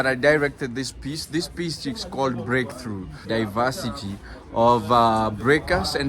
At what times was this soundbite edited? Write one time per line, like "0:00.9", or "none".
0:03.2